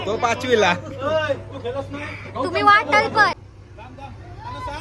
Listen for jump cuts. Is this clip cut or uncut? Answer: cut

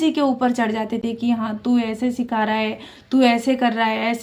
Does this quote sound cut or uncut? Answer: uncut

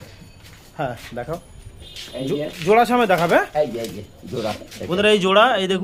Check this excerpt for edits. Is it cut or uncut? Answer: uncut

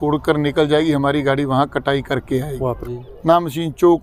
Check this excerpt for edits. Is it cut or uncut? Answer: cut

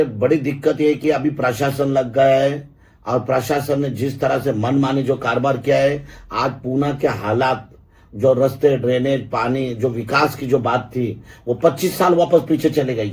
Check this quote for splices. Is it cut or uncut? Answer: uncut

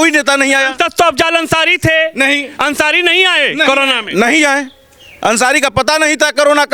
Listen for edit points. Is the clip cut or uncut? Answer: uncut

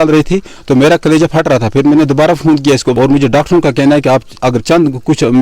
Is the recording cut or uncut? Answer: cut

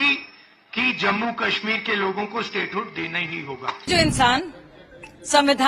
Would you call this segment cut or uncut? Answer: cut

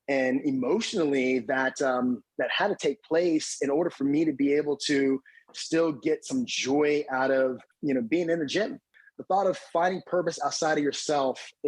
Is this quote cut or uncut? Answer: cut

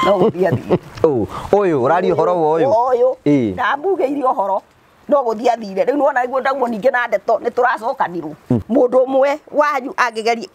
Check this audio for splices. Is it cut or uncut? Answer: cut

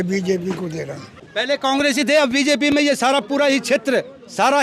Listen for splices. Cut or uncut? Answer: cut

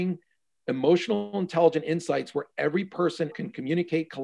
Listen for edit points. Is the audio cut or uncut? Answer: cut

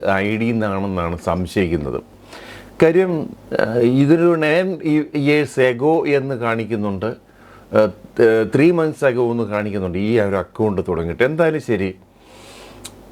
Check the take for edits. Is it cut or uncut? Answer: uncut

